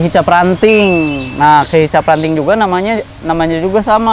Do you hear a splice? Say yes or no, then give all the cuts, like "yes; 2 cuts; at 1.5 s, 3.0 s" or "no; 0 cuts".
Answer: no; 0 cuts